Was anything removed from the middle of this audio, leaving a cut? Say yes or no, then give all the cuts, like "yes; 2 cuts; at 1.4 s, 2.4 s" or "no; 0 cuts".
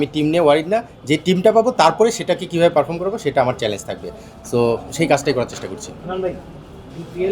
no; 0 cuts